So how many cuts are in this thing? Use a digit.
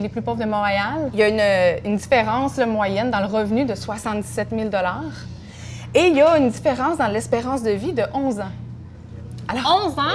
1